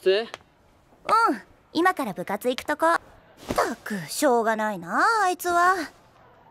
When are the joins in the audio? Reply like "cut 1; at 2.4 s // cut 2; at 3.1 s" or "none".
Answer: cut 1; at 4.9 s